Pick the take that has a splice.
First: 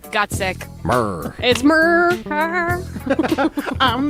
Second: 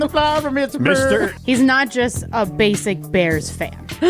second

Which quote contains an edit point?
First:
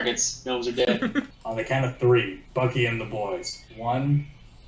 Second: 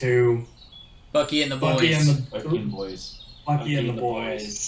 first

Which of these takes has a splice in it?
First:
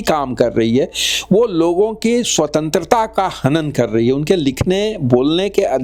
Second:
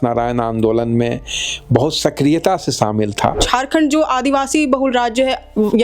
second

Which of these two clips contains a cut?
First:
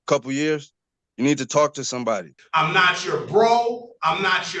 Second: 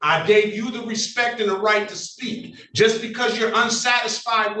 first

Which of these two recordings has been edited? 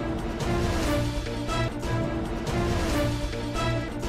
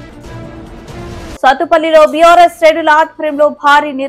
second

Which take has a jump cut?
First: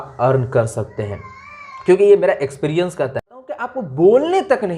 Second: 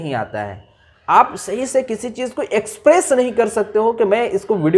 first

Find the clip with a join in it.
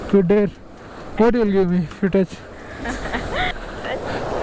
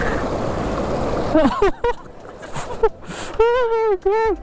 first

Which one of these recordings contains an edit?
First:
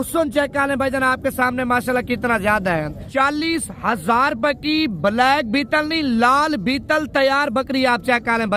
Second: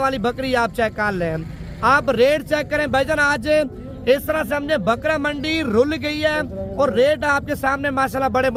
first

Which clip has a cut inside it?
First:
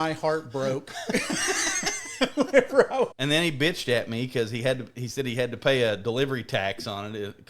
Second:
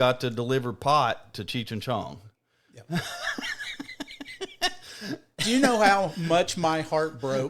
first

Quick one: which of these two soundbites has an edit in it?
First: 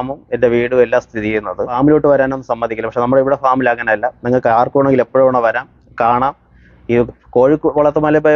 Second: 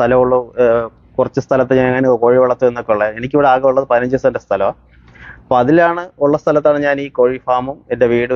first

